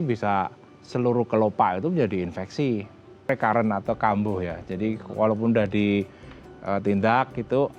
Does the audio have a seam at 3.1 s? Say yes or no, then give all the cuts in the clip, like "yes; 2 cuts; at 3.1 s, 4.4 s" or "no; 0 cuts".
yes; 1 cut; at 3.1 s